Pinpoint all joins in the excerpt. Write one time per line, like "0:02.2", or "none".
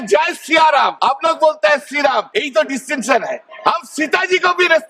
0:01.0
0:02.3
0:03.5